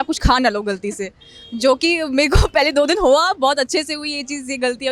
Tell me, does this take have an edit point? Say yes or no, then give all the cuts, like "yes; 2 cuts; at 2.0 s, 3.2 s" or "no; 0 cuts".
no; 0 cuts